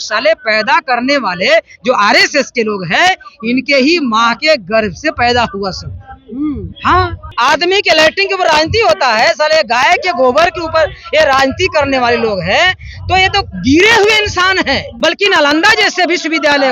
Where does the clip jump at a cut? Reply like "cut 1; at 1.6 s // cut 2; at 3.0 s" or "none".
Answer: cut 1; at 7.2 s // cut 2; at 14.9 s